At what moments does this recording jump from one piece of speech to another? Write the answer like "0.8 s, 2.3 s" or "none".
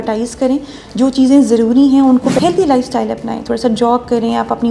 2.4 s